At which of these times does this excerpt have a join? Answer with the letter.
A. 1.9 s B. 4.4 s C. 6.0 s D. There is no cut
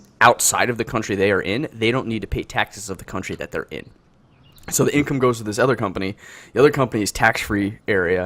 C